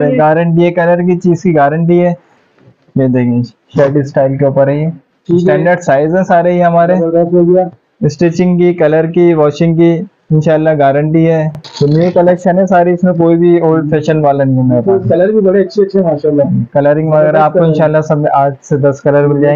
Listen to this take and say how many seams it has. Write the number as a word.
two